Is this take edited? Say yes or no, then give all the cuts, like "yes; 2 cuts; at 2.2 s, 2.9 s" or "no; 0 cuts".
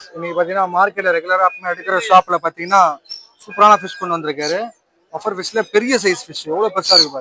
no; 0 cuts